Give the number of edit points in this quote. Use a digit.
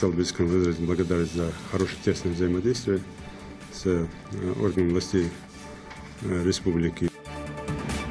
1